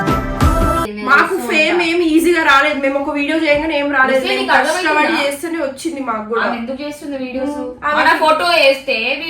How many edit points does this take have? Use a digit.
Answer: 1